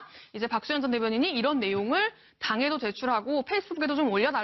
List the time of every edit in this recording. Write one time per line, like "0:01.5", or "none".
0:03.5